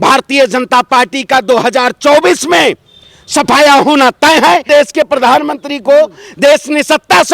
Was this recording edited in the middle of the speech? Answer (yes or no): yes